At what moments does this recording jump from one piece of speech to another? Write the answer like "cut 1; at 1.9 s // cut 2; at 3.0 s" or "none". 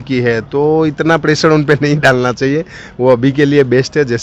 none